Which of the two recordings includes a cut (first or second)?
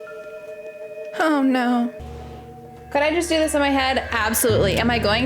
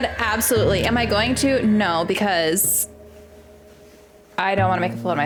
first